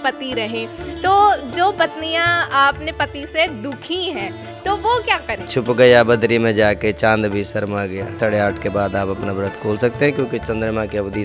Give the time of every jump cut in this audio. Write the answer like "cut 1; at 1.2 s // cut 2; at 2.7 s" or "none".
cut 1; at 5.5 s // cut 2; at 8.2 s